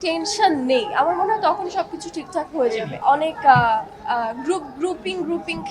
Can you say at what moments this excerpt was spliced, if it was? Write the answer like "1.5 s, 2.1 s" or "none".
3.0 s

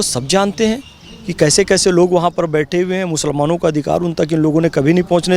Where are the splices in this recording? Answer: none

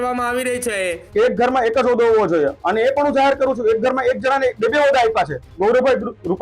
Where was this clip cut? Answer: 1.0 s, 5.5 s

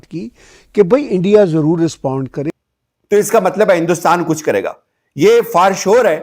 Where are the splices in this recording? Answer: 2.4 s

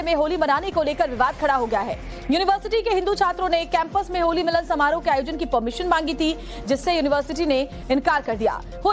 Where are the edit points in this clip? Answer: none

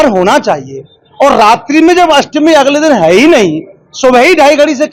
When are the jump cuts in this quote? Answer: none

